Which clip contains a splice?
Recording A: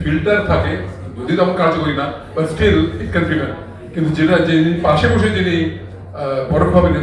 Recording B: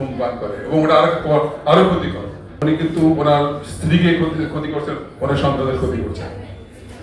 B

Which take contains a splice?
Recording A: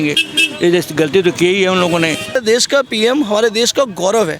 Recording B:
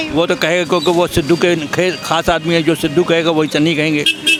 A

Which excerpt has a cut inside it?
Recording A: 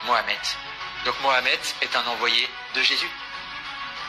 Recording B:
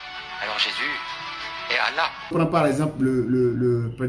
B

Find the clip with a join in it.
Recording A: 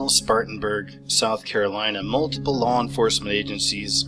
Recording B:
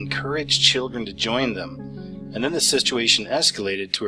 A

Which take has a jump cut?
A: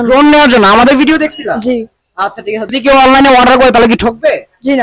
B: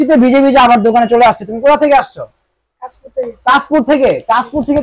A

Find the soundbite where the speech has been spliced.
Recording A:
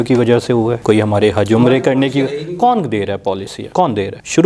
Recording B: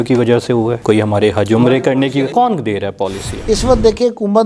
B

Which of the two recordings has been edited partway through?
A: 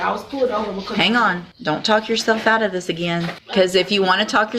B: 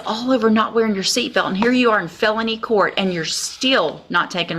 A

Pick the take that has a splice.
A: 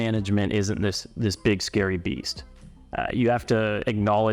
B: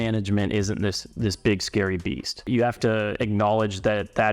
B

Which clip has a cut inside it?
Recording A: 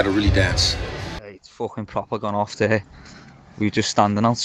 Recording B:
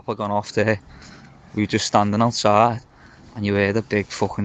A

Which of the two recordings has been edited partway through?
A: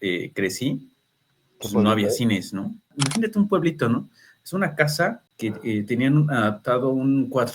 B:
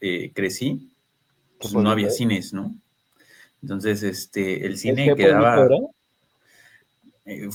A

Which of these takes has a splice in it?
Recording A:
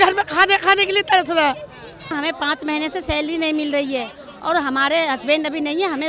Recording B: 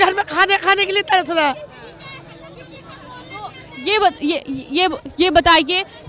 A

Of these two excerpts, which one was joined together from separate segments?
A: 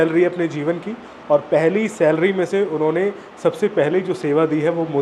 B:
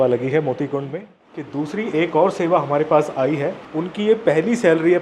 B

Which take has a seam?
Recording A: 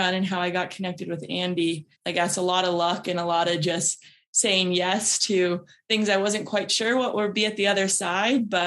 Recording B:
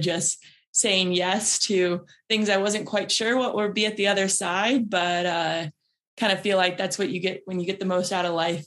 A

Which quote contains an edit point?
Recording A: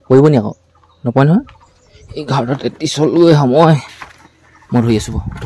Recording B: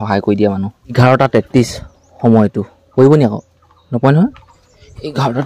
B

